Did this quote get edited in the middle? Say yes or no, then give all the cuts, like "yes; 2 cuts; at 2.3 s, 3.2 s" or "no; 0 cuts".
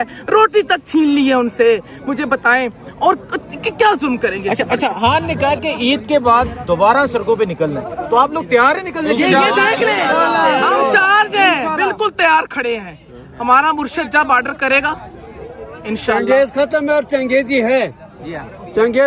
no; 0 cuts